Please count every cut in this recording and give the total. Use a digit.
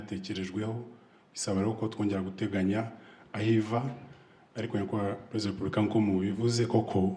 0